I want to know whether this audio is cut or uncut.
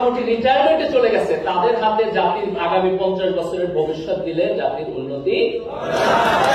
uncut